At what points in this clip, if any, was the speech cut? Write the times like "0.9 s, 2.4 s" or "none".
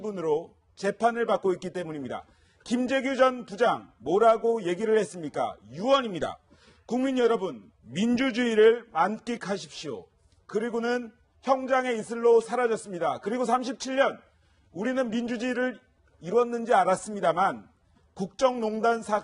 15.5 s